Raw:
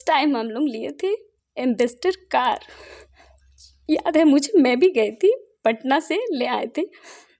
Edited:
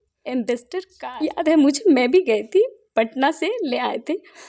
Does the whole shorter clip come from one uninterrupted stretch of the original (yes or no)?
no